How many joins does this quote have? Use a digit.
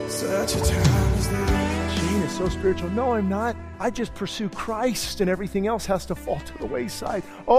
2